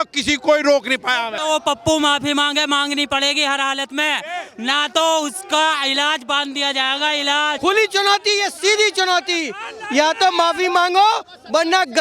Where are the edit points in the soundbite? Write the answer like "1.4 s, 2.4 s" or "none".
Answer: 1.3 s, 7.6 s